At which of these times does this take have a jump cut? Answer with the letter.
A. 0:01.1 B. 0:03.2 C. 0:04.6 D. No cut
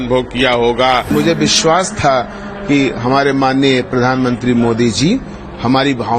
A